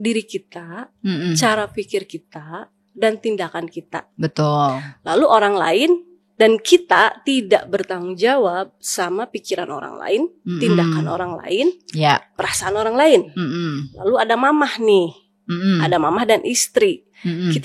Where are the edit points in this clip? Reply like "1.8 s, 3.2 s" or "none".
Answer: none